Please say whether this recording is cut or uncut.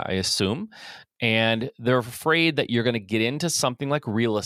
uncut